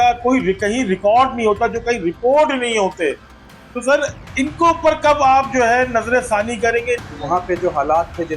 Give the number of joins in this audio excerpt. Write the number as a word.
one